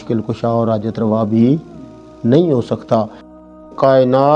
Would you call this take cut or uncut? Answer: cut